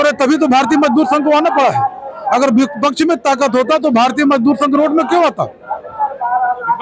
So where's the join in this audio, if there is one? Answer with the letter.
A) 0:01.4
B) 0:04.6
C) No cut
C